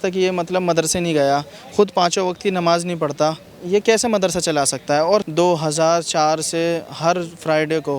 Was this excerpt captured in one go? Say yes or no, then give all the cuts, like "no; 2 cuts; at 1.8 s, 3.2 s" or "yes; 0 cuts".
no; 2 cuts; at 3.5 s, 5.2 s